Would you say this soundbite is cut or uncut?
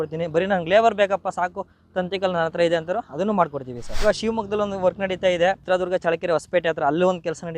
cut